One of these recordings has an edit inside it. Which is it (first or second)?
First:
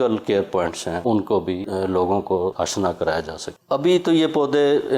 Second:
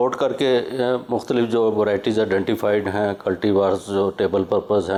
first